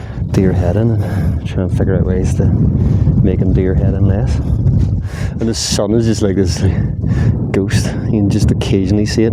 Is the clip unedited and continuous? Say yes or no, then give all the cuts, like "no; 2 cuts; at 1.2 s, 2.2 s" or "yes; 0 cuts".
yes; 0 cuts